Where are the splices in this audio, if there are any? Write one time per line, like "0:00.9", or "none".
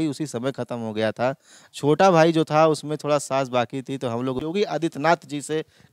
0:04.4